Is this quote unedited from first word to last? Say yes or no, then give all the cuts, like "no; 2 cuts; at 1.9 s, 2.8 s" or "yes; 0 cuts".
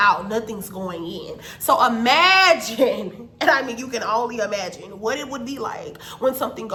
yes; 0 cuts